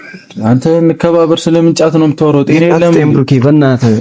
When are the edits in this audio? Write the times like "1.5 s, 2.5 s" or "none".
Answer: none